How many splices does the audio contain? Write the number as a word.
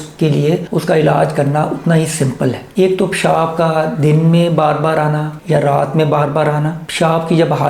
one